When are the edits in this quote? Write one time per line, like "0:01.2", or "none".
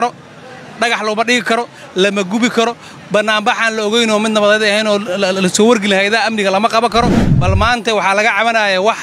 0:07.3

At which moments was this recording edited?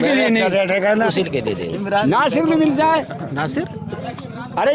0:01.1

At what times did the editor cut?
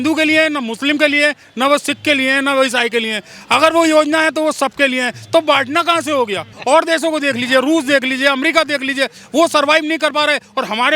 0:06.5

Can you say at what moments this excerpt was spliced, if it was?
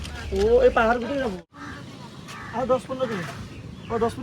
0:01.4

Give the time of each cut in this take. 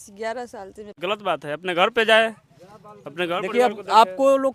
0:01.0

